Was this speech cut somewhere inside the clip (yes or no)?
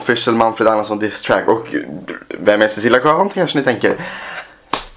no